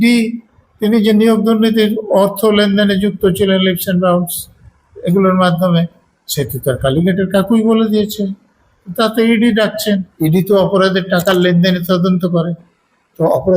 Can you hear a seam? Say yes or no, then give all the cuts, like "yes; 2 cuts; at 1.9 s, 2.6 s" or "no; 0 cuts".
yes; 1 cut; at 10.1 s